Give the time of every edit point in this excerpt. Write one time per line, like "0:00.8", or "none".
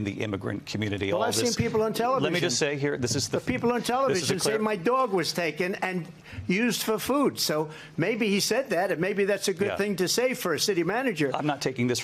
none